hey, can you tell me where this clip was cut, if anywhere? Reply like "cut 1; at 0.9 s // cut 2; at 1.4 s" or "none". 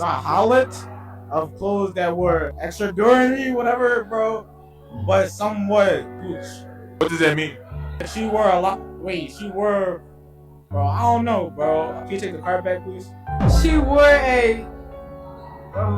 cut 1; at 3.7 s // cut 2; at 12.0 s